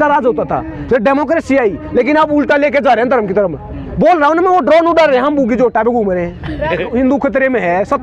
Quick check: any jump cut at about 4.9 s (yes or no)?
no